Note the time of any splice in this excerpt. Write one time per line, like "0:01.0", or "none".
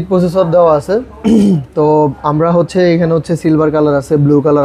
none